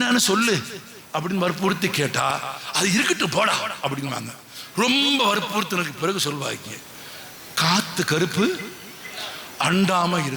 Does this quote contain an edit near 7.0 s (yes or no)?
no